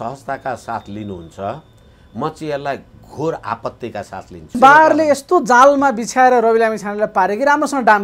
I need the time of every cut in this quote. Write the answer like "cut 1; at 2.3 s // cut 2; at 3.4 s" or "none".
cut 1; at 4.6 s